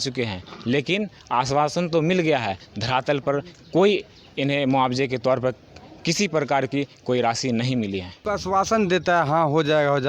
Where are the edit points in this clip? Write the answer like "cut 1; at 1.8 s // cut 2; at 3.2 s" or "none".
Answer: cut 1; at 8.1 s